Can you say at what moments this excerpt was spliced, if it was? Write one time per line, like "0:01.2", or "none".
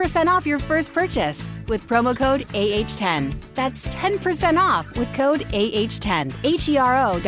0:06.3